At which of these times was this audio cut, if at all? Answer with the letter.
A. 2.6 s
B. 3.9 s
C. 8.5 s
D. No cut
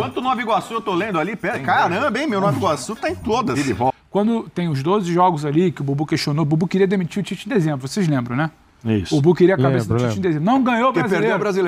B